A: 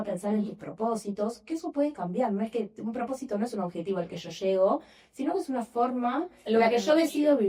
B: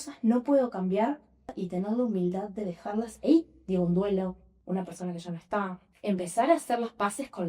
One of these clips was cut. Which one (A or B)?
B